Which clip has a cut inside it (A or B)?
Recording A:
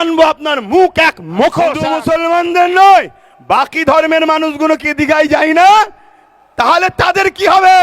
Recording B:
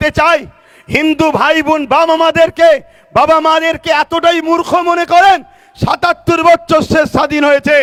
A